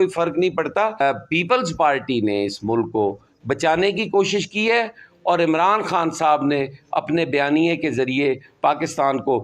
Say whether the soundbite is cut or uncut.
cut